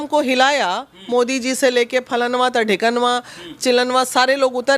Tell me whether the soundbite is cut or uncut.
uncut